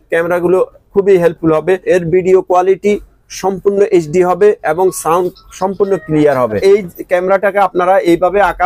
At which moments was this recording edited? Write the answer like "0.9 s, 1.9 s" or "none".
1.8 s, 6.6 s